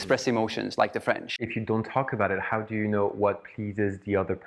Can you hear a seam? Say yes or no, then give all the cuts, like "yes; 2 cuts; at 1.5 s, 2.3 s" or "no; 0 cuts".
yes; 1 cut; at 1.3 s